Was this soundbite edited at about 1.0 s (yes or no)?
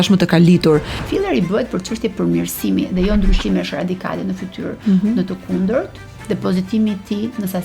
yes